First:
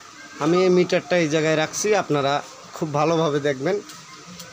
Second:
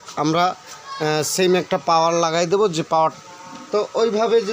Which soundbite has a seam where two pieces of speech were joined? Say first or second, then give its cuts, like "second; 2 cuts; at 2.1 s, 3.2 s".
second; 1 cut; at 3.2 s